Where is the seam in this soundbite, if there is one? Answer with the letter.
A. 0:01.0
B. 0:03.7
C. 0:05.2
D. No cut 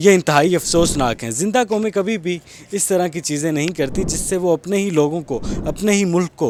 D